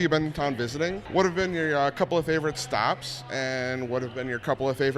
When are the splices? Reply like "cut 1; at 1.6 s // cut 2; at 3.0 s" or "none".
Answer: cut 1; at 1.0 s